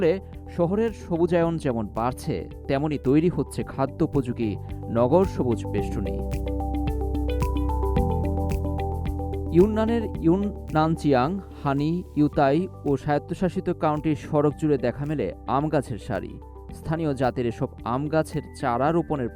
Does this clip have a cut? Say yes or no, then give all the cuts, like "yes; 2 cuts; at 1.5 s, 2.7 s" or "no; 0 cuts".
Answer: no; 0 cuts